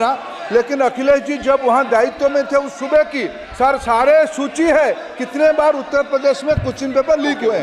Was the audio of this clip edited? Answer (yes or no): no